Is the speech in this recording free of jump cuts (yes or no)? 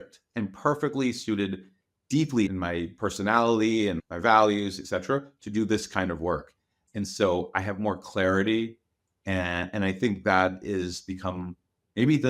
no